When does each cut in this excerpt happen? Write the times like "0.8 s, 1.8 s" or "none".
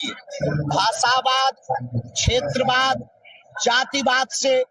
none